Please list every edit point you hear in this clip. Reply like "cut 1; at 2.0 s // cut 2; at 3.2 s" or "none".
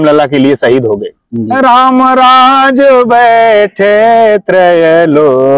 cut 1; at 1.3 s